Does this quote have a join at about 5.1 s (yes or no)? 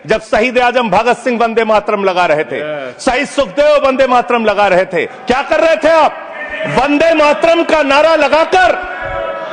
yes